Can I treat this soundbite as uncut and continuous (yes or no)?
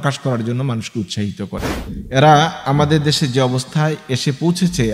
no